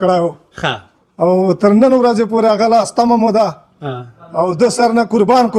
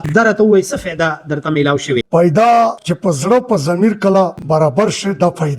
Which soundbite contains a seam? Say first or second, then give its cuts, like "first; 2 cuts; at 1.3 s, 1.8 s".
second; 1 cut; at 2.1 s